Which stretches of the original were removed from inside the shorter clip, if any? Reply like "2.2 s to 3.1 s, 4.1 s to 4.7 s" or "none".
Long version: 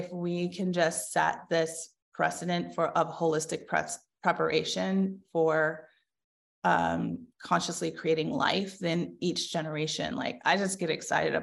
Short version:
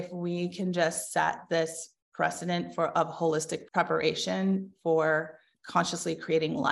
3.6 s to 4.1 s, 6.0 s to 7.3 s